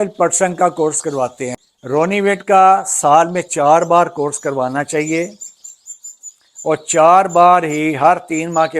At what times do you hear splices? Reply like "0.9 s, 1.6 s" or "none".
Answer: 1.5 s